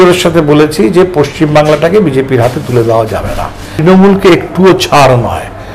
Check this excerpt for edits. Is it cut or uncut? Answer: cut